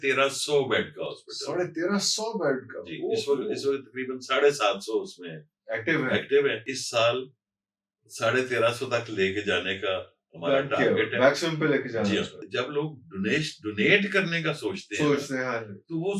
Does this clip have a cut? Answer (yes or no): yes